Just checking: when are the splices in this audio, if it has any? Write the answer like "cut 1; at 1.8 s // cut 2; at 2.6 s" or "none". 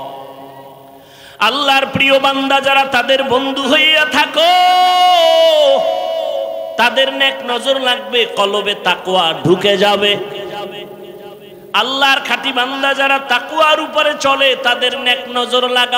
cut 1; at 1.2 s